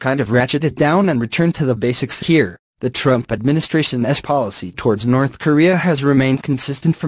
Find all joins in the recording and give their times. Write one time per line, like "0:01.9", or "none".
none